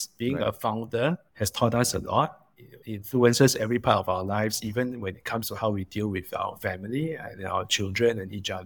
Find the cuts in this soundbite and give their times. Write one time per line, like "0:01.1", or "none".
none